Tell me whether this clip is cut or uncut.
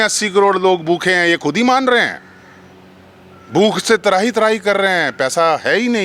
uncut